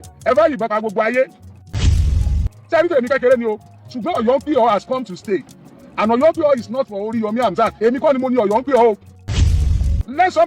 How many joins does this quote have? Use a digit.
2